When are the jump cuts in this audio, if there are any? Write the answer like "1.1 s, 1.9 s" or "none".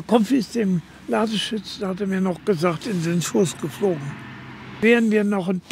4.8 s